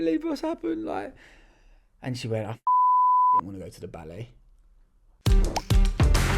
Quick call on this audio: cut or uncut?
cut